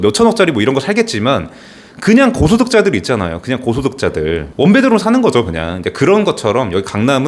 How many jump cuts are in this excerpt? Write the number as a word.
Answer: one